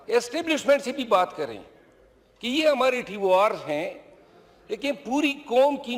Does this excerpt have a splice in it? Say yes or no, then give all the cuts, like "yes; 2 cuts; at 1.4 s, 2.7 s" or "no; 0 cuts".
no; 0 cuts